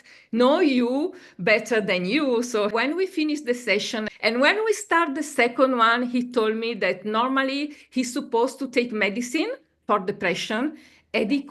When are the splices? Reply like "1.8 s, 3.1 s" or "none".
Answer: 2.7 s, 4.1 s

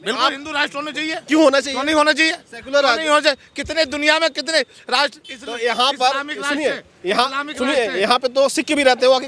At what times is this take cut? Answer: none

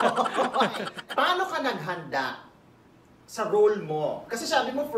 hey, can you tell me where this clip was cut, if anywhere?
1.0 s

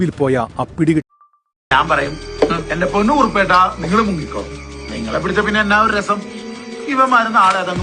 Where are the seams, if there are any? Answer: 1.6 s

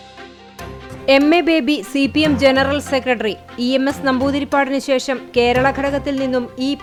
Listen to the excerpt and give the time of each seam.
none

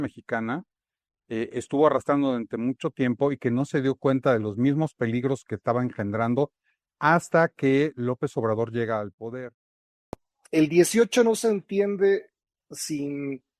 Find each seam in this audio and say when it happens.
9.9 s

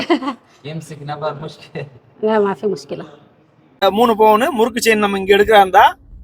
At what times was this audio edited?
3.8 s

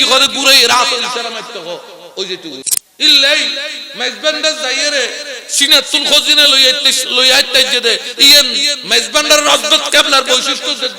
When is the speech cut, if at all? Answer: 2.8 s

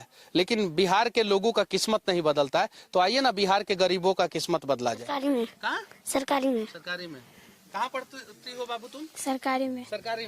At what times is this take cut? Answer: 5.1 s

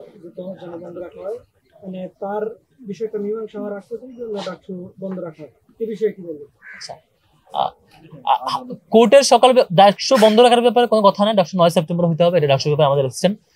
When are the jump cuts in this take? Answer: none

